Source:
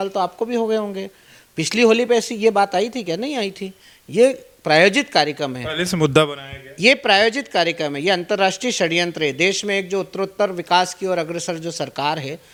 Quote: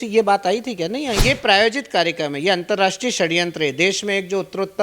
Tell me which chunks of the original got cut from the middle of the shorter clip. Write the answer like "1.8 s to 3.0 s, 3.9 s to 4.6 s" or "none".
3.5 s to 6.8 s